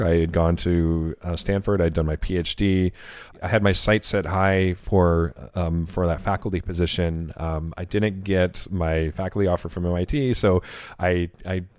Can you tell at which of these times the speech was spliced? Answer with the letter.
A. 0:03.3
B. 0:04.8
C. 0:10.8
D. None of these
A